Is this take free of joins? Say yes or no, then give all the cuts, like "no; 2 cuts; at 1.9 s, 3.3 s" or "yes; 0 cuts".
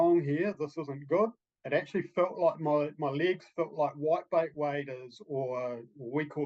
no; 1 cut; at 1.5 s